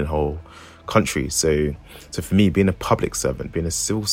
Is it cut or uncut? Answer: uncut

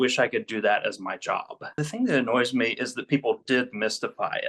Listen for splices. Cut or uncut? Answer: cut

